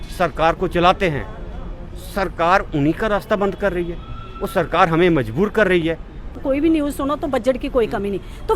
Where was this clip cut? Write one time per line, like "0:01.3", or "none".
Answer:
0:06.4